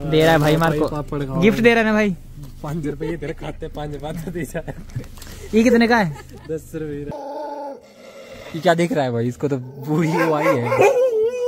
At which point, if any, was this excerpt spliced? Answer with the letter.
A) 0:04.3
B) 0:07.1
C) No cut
B